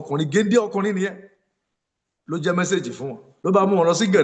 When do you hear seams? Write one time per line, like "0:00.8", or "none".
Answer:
0:03.2

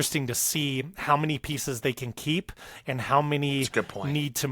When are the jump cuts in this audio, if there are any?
none

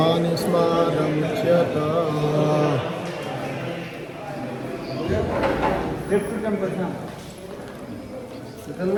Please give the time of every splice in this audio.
none

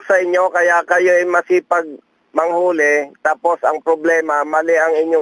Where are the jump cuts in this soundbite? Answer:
none

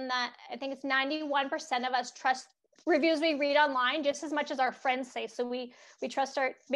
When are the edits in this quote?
0:02.6

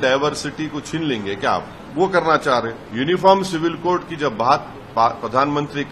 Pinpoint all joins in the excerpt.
0:01.8
0:02.8

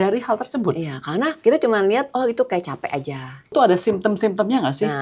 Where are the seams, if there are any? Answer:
0:01.3
0:03.5

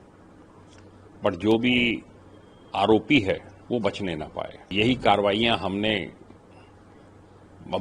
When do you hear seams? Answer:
0:04.7

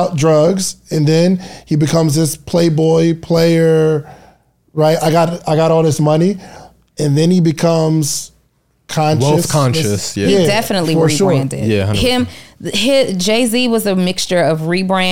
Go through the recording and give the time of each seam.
none

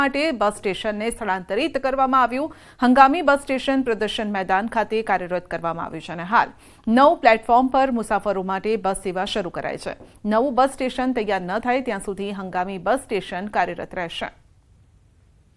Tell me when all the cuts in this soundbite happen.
0:13.5

